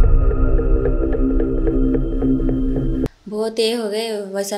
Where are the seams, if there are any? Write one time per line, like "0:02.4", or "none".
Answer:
0:03.1